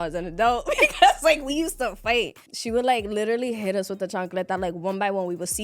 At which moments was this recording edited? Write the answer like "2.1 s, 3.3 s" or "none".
2.5 s